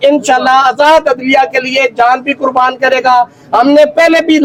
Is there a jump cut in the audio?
no; 0 cuts

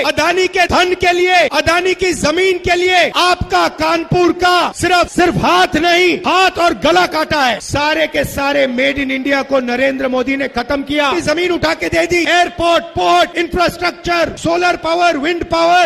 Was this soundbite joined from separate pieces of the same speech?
yes; 1 cut; at 11.1 s

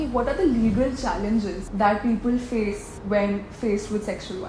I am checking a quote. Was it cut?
yes; 2 cuts; at 1.6 s, 2.9 s

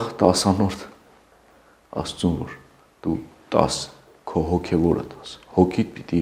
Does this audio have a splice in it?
no; 0 cuts

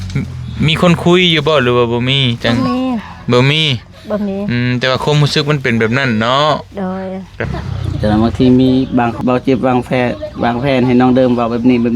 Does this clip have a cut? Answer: yes; 2 cuts; at 7.4 s, 9.1 s

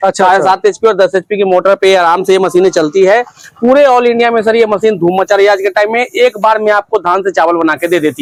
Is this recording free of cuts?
yes; 0 cuts

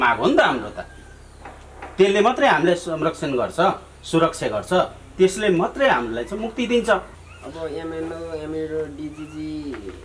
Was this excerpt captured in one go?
no; 1 cut; at 7.2 s

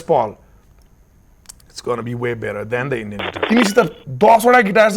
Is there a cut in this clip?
yes; 1 cut; at 3.3 s

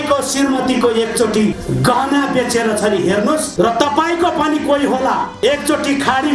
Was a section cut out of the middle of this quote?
yes; 3 cuts; at 1.5 s, 3.5 s, 5.3 s

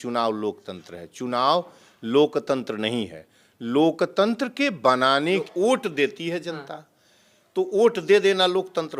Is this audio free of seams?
no; 1 cut; at 5.5 s

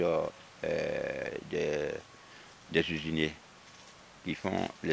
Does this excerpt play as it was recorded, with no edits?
yes; 0 cuts

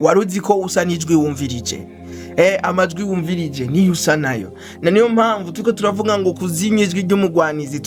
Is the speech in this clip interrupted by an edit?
no; 0 cuts

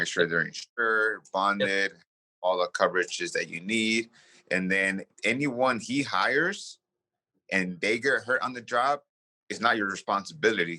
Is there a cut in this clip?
yes; 1 cut; at 5.1 s

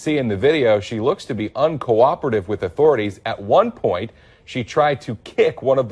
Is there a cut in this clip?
no; 0 cuts

